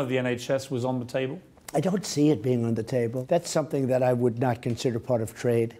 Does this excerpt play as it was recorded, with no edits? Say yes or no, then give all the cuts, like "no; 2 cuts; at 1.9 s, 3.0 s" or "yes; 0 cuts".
no; 1 cut; at 3.2 s